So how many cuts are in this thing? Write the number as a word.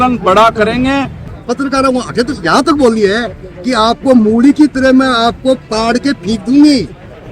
one